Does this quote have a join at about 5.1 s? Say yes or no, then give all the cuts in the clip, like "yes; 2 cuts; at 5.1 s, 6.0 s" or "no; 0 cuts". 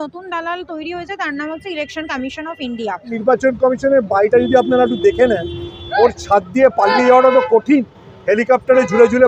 no; 1 cut; at 3.2 s